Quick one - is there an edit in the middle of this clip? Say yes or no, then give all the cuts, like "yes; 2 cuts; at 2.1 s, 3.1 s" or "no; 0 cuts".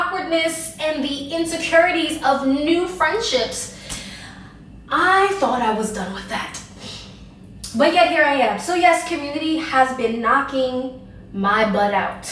no; 0 cuts